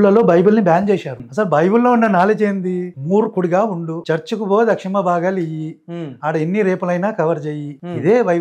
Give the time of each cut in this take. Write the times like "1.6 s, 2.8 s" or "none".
1.1 s

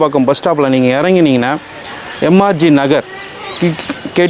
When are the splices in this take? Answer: none

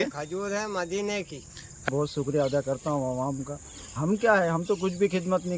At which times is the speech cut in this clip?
1.9 s

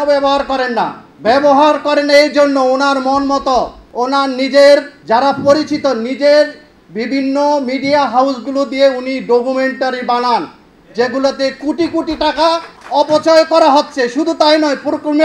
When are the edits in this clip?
1.1 s, 3.8 s, 4.9 s, 12.7 s

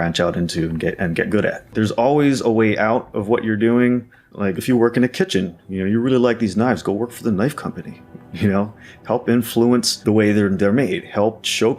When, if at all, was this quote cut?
1.7 s

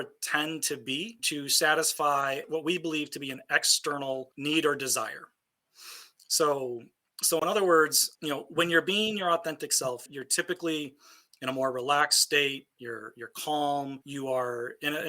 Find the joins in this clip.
2.4 s, 10.1 s

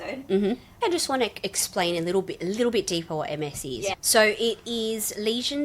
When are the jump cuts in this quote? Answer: 0.8 s, 3.9 s

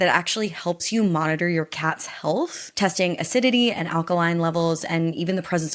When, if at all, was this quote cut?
none

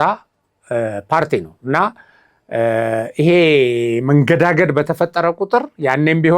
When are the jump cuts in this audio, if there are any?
none

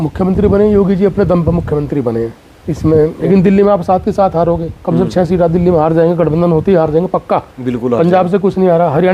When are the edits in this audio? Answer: 3.2 s

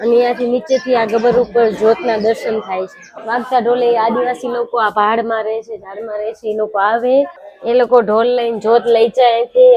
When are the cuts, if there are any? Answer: 3.0 s, 7.4 s

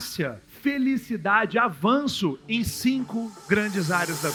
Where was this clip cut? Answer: none

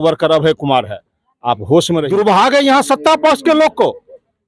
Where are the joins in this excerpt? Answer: 2.0 s

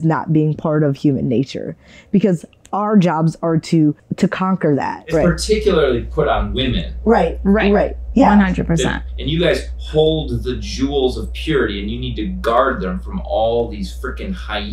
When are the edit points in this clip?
4.1 s, 5.1 s, 9.1 s

